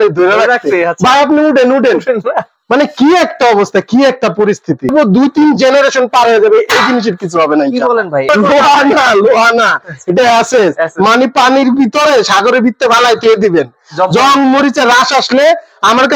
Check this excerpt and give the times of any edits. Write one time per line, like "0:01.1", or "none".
0:04.9
0:08.3